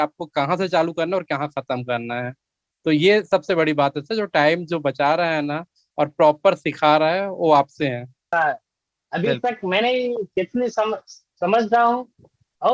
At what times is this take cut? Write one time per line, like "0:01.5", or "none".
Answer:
0:08.3